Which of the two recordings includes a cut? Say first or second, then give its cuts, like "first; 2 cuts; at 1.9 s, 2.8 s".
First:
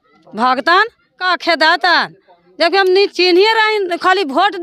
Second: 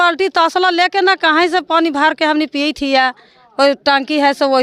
first; 1 cut; at 1.2 s